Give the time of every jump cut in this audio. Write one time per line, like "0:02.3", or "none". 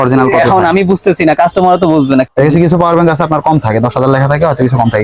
0:02.3